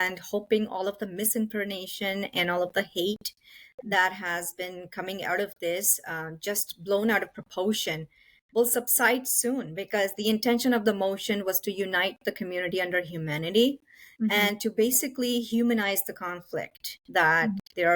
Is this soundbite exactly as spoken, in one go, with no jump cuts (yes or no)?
yes